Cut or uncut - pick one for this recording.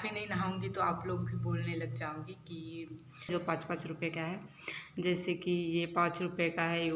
cut